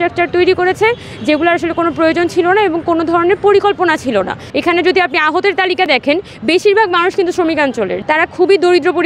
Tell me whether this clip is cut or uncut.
cut